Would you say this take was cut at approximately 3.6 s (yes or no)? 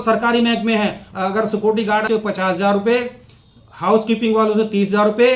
no